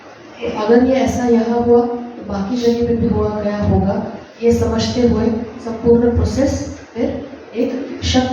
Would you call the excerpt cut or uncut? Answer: uncut